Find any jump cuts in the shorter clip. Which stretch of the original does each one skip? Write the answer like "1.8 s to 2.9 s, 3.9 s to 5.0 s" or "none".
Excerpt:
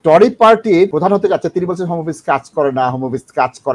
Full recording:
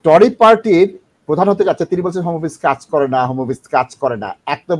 0.9 s to 1.3 s